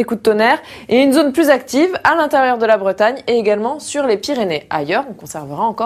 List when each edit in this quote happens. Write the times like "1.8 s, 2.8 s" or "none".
none